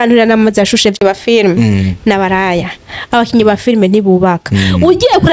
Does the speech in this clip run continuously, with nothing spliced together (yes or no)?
no